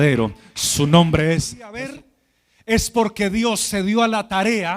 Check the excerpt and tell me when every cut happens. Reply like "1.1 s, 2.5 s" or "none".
1.7 s